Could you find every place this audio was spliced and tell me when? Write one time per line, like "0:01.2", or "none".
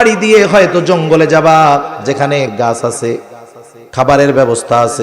0:02.5

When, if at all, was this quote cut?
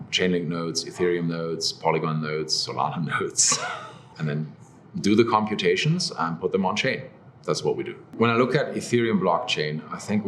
0:04.1
0:08.0

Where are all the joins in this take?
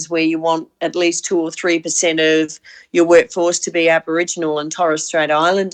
none

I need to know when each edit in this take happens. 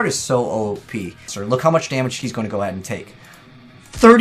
0:01.3

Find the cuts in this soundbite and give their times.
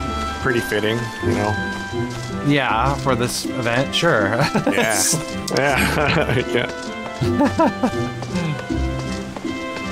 none

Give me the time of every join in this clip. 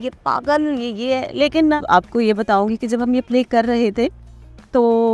0:01.8

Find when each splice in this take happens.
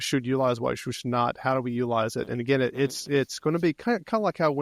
none

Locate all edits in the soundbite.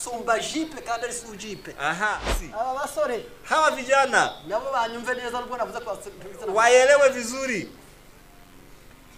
0:02.4

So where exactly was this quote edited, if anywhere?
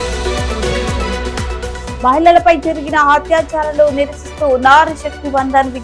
0:01.9

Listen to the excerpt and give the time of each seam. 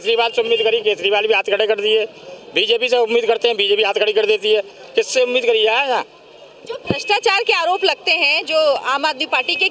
none

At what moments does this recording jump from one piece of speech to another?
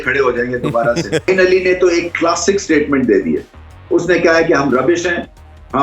0:01.3

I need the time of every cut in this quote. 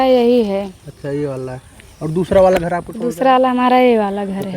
0:03.1

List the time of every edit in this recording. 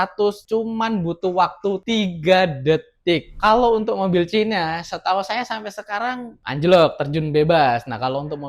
0:03.3

